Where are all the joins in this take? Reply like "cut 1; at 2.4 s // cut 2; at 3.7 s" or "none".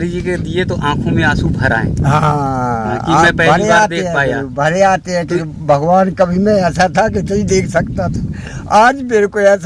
none

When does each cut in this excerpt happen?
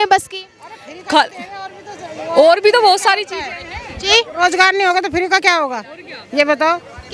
none

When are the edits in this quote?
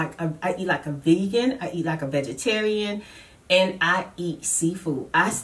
none

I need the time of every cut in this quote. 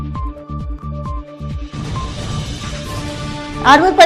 cut 1; at 1.3 s

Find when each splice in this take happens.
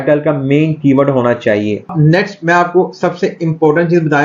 cut 1; at 1.9 s

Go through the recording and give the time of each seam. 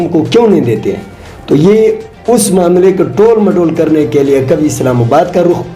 none

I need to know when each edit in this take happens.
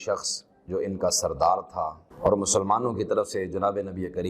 cut 1; at 2.0 s

